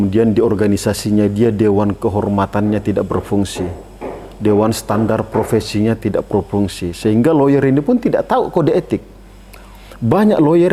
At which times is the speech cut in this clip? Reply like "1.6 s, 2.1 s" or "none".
none